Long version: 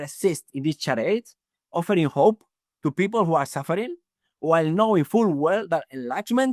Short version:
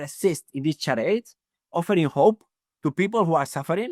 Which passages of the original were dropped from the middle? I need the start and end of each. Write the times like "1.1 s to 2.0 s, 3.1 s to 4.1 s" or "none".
none